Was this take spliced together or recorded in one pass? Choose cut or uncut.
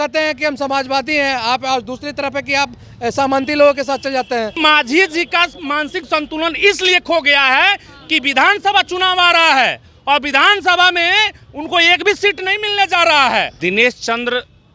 cut